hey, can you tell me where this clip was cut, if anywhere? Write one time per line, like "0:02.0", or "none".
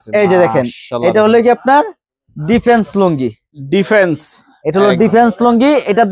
none